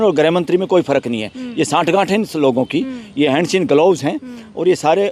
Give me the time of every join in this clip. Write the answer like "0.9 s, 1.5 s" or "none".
none